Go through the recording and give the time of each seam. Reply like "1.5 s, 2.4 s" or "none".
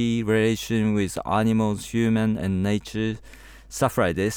none